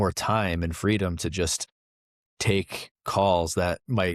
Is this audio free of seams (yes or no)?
no